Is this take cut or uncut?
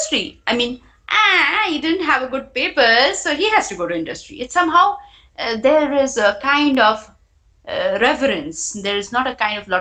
uncut